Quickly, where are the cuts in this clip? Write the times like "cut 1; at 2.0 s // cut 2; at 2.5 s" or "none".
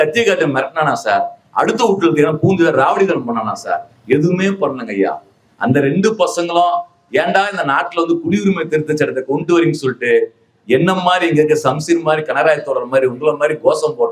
cut 1; at 7.0 s